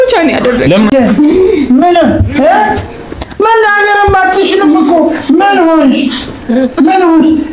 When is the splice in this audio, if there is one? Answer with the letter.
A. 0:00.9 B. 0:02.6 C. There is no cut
A